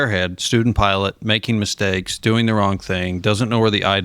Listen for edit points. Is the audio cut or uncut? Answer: uncut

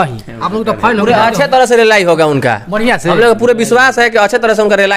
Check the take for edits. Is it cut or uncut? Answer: uncut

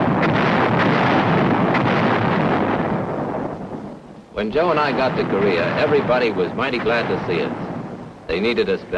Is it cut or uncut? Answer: cut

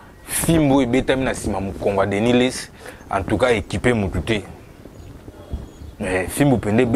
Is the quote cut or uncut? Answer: uncut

